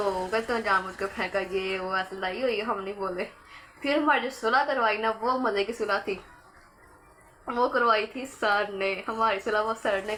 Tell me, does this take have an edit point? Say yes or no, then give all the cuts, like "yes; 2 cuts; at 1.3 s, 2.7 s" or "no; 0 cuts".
no; 0 cuts